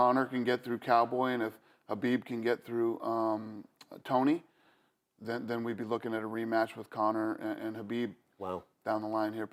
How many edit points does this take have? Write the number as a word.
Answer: zero